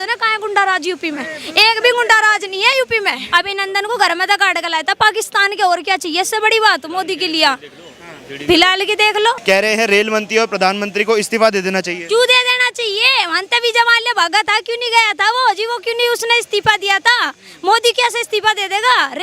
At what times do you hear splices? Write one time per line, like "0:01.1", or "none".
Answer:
0:03.2
0:09.4